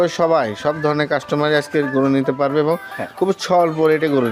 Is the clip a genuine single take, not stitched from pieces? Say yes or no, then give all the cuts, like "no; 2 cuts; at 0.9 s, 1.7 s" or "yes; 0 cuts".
yes; 0 cuts